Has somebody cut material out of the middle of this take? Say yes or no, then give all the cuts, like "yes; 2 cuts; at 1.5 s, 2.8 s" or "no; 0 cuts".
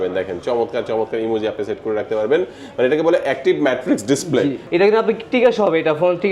yes; 1 cut; at 4.6 s